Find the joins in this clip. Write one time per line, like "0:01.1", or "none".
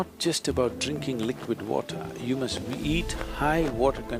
none